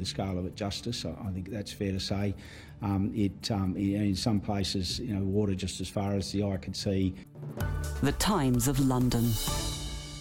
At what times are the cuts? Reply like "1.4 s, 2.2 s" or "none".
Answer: 7.3 s